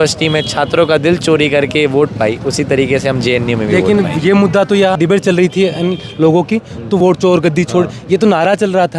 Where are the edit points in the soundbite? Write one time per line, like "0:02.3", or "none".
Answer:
0:04.9
0:07.0